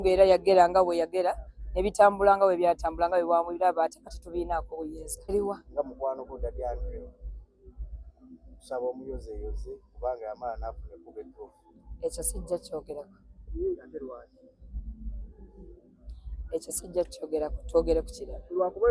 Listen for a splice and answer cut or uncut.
cut